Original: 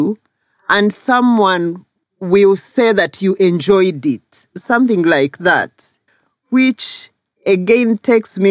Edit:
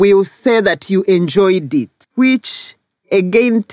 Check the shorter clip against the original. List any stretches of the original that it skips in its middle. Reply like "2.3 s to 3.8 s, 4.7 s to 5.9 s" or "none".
4.3 s to 6.3 s